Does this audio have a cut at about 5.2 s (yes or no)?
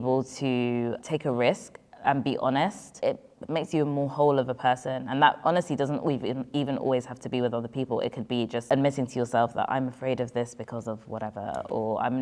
no